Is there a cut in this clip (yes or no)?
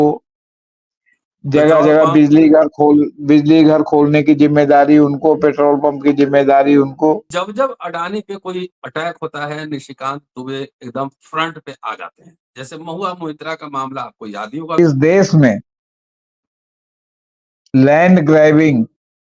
yes